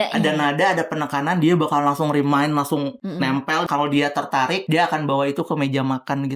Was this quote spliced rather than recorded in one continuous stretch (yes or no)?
yes